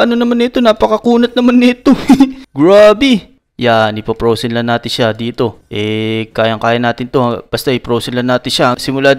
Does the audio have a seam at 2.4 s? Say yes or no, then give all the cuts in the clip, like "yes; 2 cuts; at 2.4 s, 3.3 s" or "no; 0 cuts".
no; 0 cuts